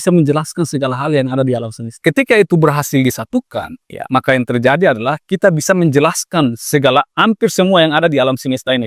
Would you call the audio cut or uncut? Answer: cut